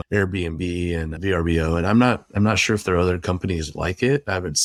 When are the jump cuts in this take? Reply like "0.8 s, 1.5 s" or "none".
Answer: none